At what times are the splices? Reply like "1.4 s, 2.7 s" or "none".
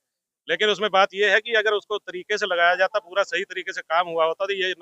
none